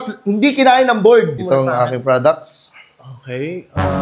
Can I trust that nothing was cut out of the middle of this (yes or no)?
no